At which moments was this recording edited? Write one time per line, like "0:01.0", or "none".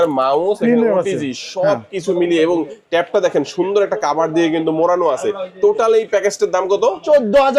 none